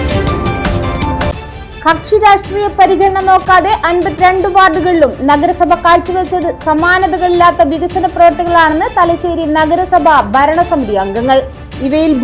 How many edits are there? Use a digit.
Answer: 1